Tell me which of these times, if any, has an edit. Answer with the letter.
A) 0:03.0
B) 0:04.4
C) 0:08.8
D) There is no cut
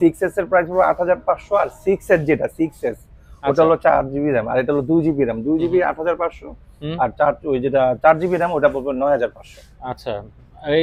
D